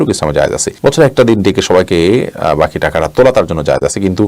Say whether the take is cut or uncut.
uncut